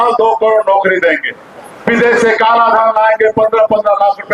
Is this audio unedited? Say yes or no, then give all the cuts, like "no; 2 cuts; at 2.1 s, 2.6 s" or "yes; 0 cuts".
yes; 0 cuts